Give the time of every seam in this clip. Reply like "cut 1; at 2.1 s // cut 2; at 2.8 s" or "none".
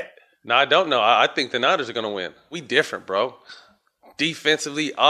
cut 1; at 2.6 s